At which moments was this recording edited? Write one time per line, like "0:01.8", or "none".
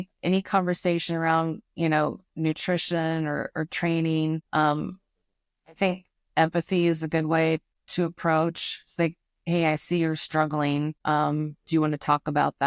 0:04.4
0:07.8
0:11.0

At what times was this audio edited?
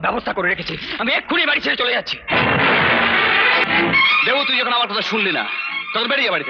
0:03.6

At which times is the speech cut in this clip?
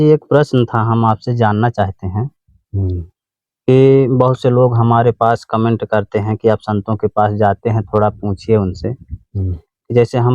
none

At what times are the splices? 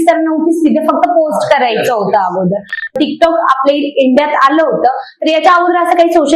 0:02.9

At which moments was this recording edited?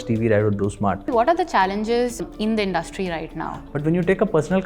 0:01.1
0:02.2
0:03.6

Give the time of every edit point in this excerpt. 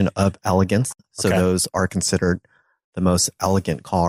none

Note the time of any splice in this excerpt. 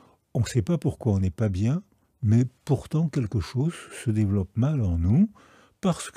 none

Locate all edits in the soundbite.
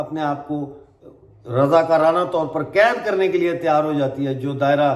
none

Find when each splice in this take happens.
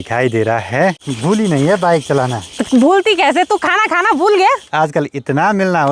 0:01.1
0:04.7

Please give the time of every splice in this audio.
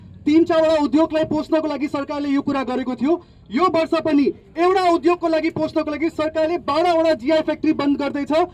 none

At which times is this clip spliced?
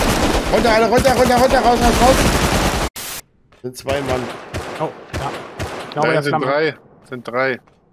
0:02.9

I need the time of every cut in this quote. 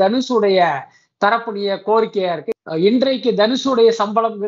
0:02.5

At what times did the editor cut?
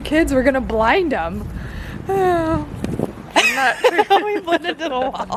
none

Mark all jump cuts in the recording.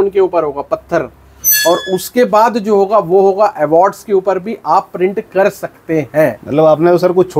none

